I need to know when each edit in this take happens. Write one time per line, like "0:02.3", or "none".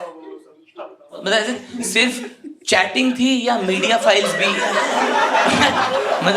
0:01.2

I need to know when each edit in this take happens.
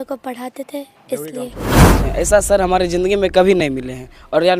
0:02.0

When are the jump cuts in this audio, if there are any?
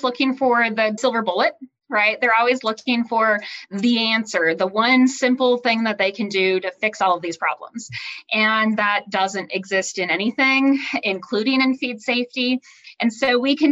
0:01.0

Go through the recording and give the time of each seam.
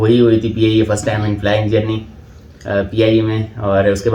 none

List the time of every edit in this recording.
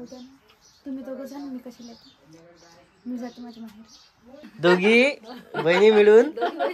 0:04.5

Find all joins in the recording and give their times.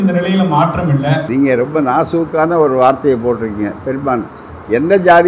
0:01.2

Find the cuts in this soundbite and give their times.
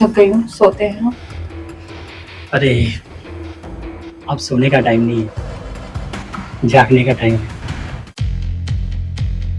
none

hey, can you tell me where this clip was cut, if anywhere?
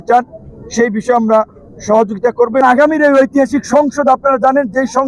0:02.6

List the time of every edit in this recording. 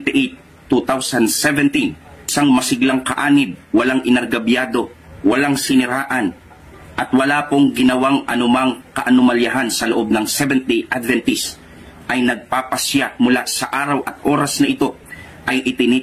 none

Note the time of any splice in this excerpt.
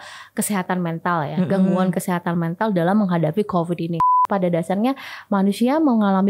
0:04.1

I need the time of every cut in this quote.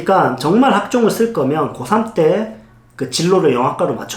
none

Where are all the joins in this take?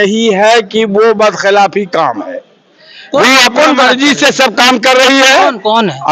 none

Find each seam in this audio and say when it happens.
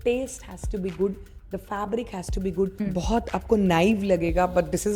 0:02.8

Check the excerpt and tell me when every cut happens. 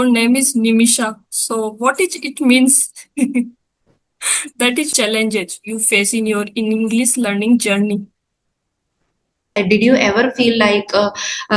0:04.9
0:09.5

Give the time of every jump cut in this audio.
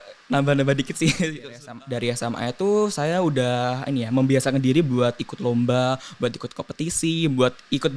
0:01.7

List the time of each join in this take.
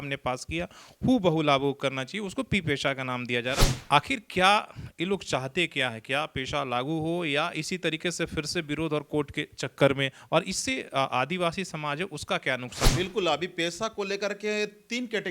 0:03.7
0:12.9

